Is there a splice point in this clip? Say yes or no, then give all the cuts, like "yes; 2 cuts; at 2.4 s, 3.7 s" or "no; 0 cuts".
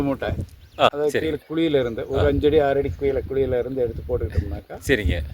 yes; 1 cut; at 0.9 s